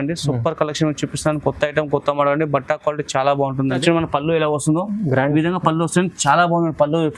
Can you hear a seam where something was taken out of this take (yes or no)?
yes